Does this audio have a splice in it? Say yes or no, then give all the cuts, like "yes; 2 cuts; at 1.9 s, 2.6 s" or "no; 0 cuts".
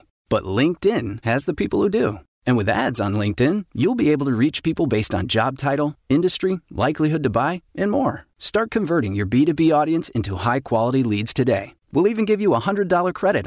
no; 0 cuts